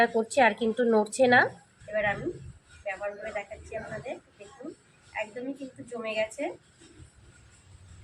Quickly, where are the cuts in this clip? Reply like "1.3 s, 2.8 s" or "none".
1.8 s